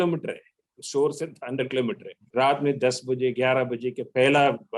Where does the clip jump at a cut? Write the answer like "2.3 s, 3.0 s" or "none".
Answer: 2.1 s